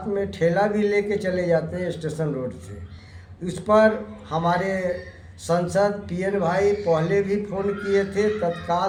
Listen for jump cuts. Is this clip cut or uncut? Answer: uncut